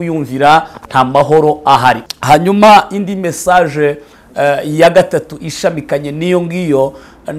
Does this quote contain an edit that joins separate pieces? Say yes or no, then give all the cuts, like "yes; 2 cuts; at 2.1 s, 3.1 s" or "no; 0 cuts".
yes; 1 cut; at 2.1 s